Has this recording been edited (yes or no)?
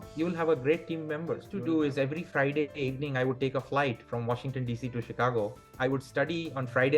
yes